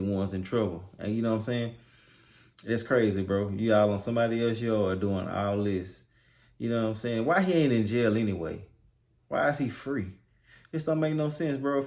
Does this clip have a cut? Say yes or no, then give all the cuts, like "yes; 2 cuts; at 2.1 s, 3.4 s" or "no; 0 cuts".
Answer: no; 0 cuts